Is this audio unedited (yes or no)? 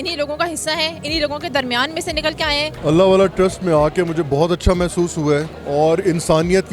no